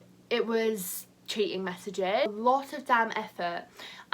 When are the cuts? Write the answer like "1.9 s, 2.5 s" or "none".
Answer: 2.3 s